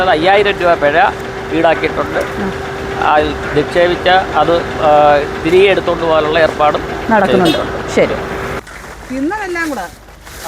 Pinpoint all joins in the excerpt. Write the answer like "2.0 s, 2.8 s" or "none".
8.6 s

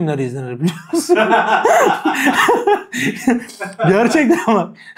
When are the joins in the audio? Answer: none

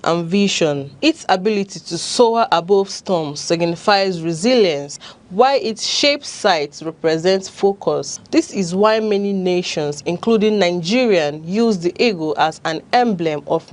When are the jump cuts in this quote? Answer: 11.9 s

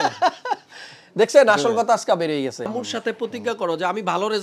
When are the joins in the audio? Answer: 2.7 s

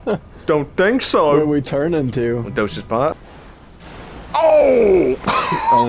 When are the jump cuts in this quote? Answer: 3.1 s

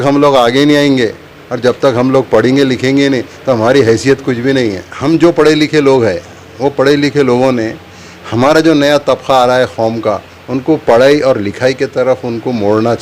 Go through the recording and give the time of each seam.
4.9 s

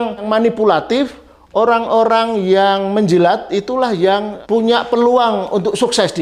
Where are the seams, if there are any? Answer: none

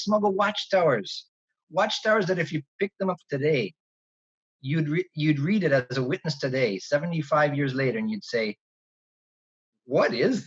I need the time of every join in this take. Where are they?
none

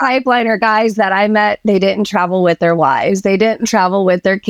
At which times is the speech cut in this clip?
none

